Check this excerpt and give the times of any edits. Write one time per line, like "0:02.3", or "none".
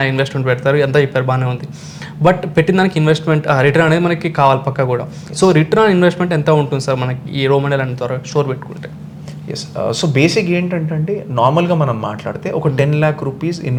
none

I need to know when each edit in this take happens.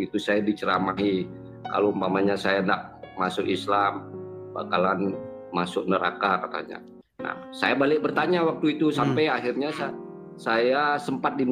none

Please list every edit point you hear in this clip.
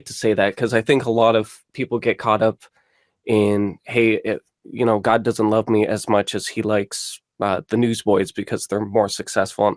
none

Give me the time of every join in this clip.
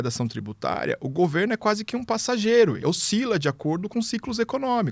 0:02.8

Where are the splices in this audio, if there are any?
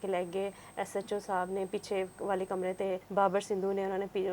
0:03.0

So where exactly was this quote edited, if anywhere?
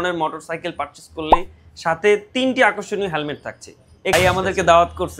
0:04.1

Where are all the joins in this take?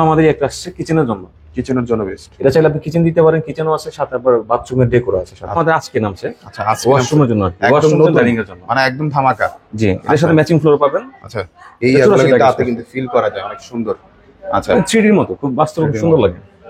0:05.6

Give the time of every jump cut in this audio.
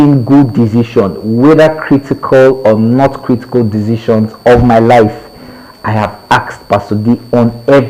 none

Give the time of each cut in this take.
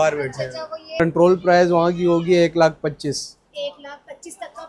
0:01.0

